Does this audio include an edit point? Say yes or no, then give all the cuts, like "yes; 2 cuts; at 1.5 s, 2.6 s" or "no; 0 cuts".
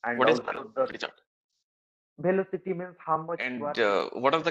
yes; 1 cut; at 3.5 s